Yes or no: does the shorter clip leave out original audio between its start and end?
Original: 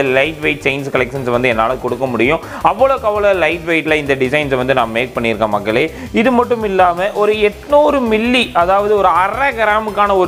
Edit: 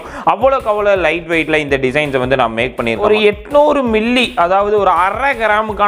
yes